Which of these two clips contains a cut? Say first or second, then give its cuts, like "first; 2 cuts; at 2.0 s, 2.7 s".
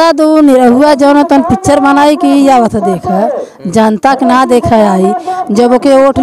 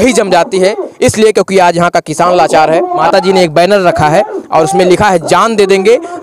second; 1 cut; at 3.0 s